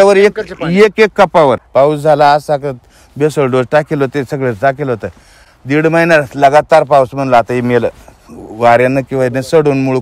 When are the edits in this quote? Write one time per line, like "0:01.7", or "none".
0:01.6